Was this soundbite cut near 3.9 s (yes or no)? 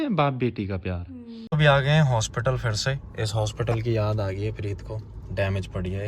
no